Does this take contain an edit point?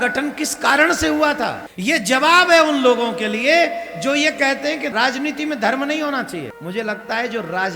yes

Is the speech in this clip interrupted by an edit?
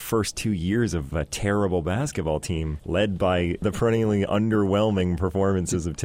yes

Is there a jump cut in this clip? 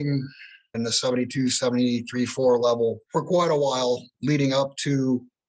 yes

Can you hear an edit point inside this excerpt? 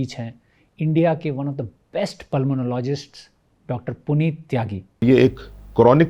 yes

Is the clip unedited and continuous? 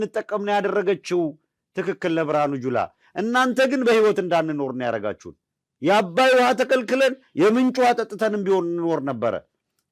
yes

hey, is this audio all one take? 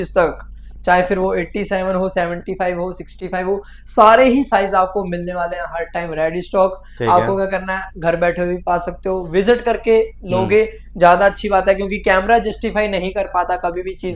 yes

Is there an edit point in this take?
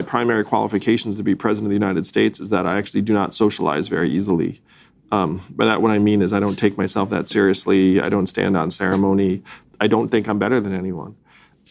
no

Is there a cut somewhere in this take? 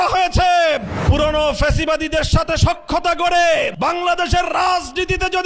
yes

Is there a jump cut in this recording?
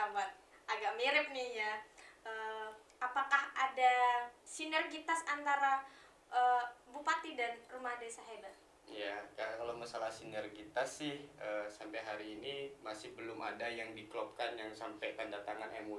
yes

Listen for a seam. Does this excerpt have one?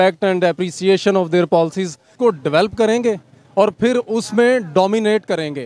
yes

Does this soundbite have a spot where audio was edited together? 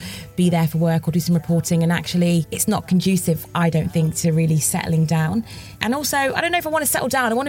yes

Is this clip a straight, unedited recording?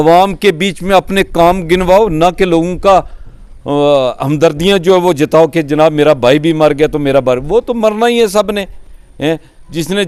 yes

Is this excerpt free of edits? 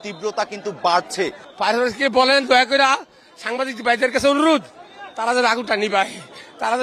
no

